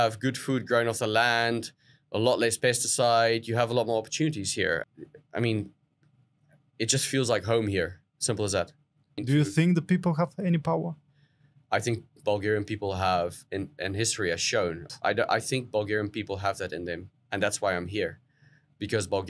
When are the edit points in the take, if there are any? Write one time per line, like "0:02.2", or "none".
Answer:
0:04.8
0:09.2
0:14.8

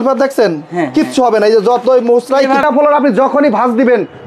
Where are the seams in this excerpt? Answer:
0:02.6

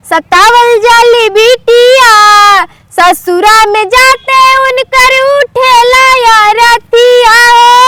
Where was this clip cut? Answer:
none

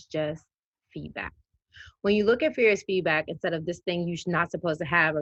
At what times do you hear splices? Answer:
none

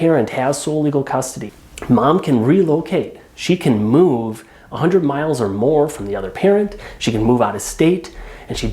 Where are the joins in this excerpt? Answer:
0:01.4

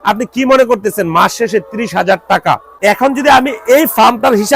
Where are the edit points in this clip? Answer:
0:02.7

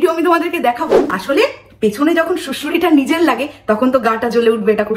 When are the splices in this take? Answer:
0:01.0

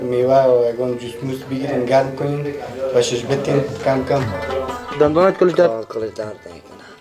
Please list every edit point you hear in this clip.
0:04.8

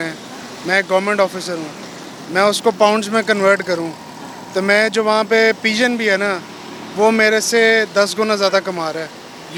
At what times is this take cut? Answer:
none

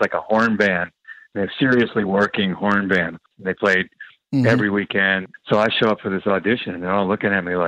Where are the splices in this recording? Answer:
0:03.2
0:05.3

